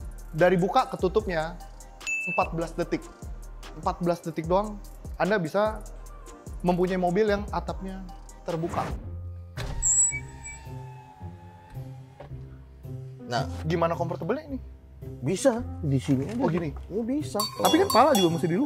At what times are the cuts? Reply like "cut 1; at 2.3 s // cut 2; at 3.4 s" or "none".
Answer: cut 1; at 8.9 s // cut 2; at 17.6 s